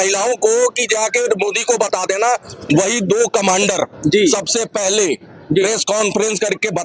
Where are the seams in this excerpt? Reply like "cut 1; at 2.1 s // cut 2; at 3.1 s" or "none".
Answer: none